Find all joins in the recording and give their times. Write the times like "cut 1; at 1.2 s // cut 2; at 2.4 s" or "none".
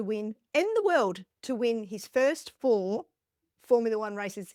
none